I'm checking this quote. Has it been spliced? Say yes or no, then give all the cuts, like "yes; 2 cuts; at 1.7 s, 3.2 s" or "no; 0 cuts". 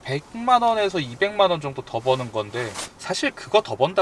no; 0 cuts